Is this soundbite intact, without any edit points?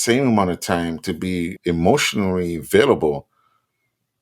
no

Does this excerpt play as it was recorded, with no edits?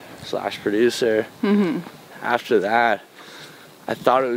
no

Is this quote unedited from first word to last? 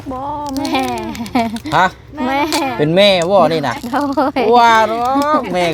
yes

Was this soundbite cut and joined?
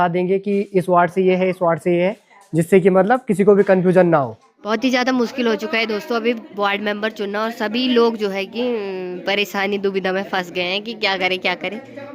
no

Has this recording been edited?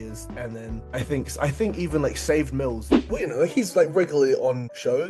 yes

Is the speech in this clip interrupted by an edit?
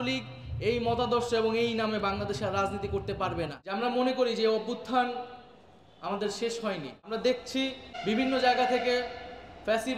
yes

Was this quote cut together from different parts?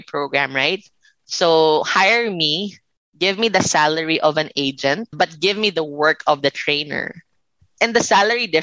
yes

